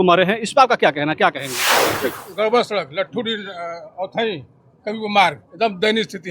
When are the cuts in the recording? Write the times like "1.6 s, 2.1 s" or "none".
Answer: 1.8 s